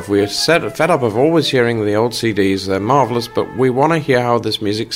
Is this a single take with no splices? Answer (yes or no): yes